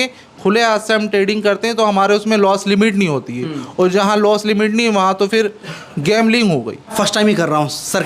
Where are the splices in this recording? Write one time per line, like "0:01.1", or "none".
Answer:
0:06.9